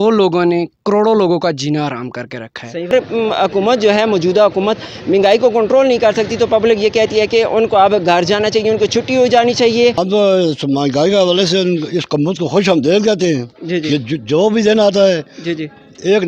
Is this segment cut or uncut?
cut